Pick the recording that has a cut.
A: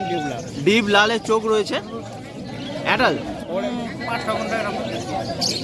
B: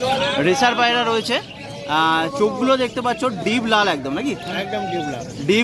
A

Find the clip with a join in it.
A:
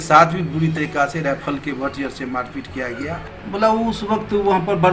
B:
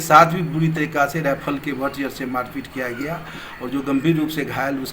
A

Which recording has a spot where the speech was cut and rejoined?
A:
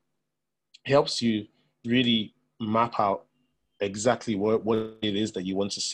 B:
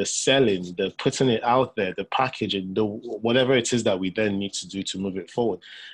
A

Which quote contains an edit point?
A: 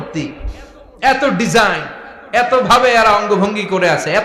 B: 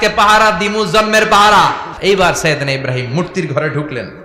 B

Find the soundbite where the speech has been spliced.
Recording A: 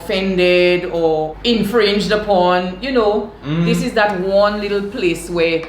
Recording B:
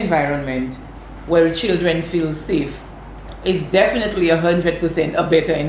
A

